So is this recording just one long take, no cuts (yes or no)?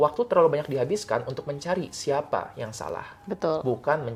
yes